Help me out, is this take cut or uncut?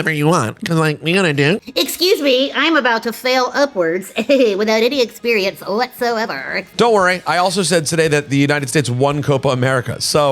cut